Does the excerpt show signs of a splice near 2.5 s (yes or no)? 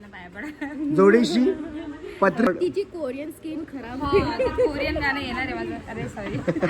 yes